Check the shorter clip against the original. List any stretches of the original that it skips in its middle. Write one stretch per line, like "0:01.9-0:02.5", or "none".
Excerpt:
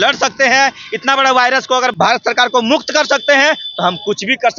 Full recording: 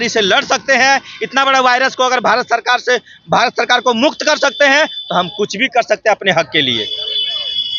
0:02.2-0:03.2